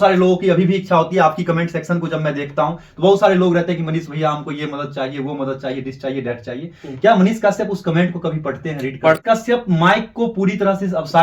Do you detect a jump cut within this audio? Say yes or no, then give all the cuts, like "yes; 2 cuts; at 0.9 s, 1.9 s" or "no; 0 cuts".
yes; 1 cut; at 9.2 s